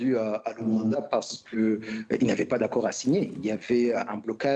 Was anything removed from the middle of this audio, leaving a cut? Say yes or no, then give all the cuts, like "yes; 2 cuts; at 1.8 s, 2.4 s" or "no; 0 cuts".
no; 0 cuts